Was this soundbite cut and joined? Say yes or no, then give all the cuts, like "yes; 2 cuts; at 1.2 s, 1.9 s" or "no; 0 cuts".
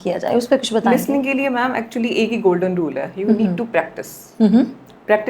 no; 0 cuts